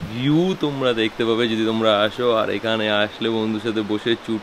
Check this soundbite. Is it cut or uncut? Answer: uncut